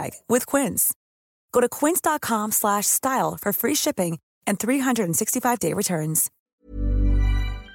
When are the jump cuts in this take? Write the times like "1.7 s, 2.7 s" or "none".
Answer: 6.3 s